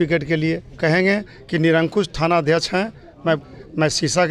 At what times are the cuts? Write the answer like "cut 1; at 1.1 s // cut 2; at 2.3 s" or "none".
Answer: cut 1; at 0.8 s // cut 2; at 3.4 s